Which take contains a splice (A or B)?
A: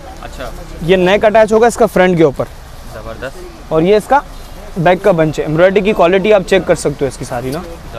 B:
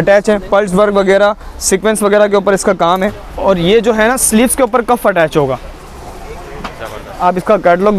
B